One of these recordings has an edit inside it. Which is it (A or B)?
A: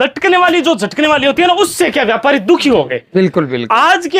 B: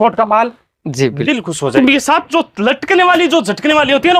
B